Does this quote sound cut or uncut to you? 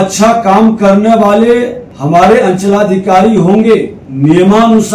cut